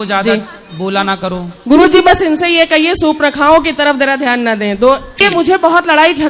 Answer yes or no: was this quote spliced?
yes